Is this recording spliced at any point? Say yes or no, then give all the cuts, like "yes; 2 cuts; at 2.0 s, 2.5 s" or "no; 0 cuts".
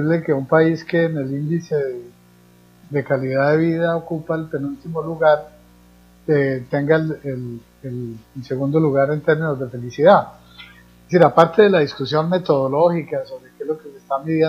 yes; 1 cut; at 4.1 s